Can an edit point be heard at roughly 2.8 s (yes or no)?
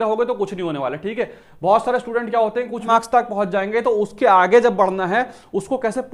yes